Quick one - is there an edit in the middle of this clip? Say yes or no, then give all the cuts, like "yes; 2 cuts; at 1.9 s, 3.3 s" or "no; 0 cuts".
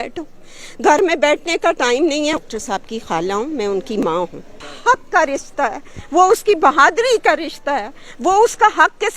yes; 2 cuts; at 2.4 s, 4.6 s